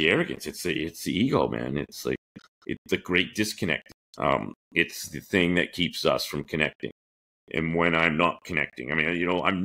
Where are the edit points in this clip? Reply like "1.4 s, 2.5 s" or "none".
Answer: 3.9 s